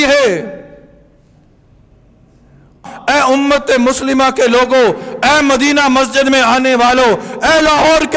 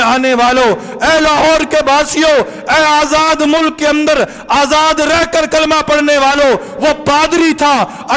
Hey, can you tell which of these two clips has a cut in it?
first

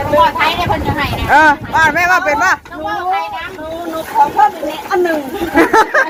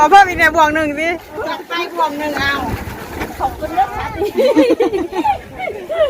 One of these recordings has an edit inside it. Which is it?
second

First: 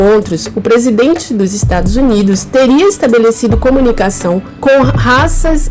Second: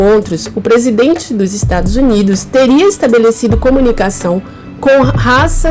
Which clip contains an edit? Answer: first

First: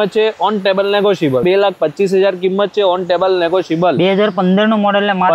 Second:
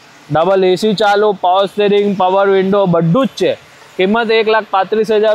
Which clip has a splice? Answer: first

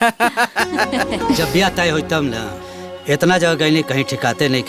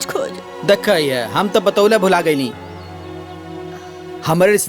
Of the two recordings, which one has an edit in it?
first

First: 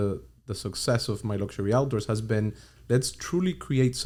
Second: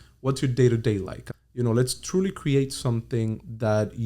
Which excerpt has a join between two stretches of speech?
second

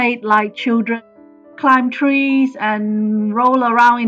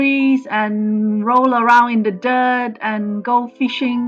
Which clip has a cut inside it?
first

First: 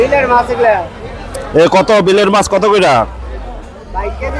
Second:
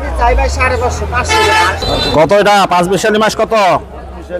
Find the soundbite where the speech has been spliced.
second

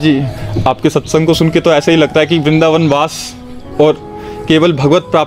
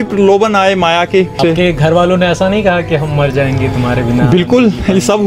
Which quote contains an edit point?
second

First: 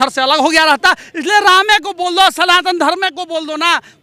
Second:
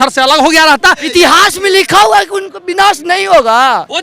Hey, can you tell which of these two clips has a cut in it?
second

